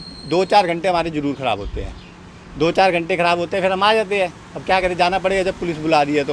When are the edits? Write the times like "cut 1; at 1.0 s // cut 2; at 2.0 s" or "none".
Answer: none